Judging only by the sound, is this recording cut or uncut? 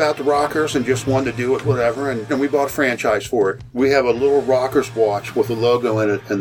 cut